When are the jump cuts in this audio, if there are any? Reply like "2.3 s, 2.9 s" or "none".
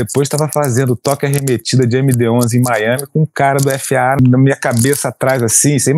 4.2 s